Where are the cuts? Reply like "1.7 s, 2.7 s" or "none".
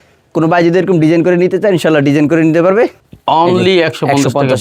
3.0 s